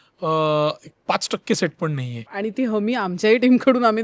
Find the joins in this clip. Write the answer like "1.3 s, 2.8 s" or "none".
2.2 s